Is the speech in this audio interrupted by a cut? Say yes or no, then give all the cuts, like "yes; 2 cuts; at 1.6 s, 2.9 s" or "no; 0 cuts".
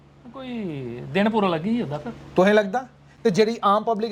no; 0 cuts